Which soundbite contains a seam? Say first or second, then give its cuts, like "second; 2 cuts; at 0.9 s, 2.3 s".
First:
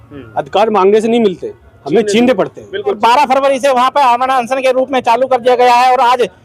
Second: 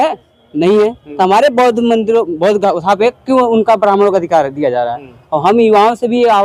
first; 1 cut; at 3.0 s